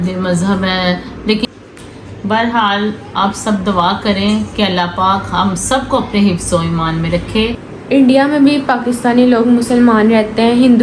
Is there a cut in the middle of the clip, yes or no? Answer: yes